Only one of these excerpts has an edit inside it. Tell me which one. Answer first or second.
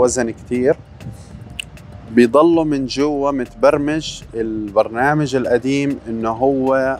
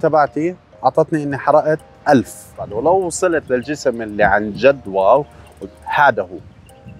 second